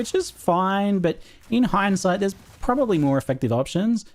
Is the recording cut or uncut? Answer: cut